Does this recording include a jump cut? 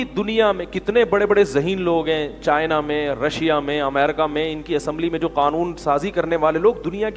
no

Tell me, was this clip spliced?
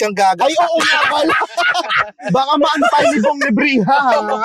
no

